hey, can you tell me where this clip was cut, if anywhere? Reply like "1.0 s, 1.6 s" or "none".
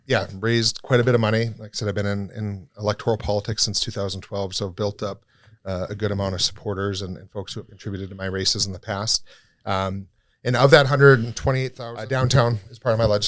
11.6 s

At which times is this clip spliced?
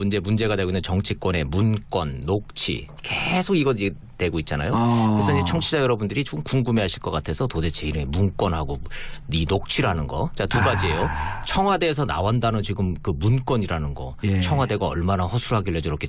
3.8 s

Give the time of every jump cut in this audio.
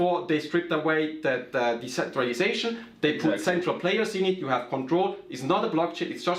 none

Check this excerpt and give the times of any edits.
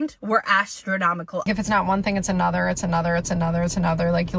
1.5 s

